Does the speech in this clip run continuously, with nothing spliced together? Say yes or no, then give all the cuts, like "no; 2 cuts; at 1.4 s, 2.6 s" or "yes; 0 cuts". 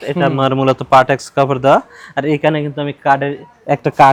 yes; 0 cuts